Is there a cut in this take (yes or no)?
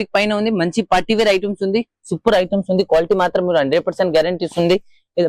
no